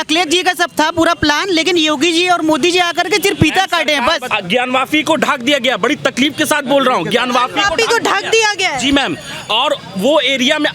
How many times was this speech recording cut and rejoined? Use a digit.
1